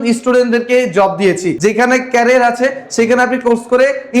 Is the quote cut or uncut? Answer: cut